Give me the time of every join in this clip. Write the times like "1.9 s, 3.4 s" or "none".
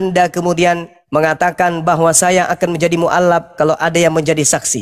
0.9 s